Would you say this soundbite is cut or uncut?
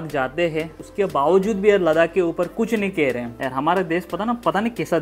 cut